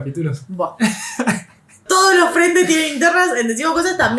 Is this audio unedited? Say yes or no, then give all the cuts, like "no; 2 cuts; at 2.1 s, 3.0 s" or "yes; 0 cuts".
no; 1 cut; at 1.8 s